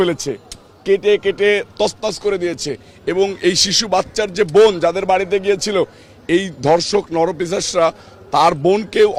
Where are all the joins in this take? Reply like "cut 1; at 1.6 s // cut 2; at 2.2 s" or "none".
none